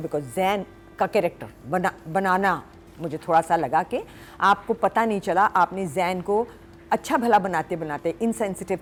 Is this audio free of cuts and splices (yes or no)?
yes